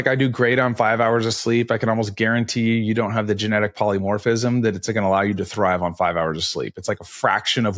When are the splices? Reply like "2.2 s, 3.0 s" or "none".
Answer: none